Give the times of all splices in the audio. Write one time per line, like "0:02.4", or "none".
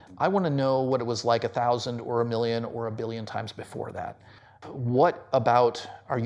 0:04.6